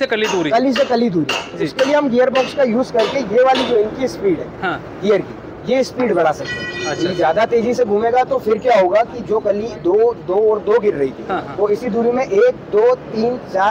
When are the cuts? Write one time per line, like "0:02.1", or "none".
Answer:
none